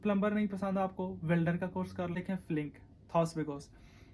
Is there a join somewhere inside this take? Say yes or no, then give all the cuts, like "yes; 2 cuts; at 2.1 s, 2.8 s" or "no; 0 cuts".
yes; 1 cut; at 2.2 s